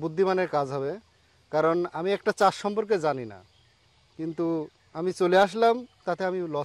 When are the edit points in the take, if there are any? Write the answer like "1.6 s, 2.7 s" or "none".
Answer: none